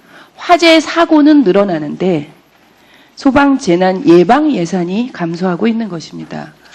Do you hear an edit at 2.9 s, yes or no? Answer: no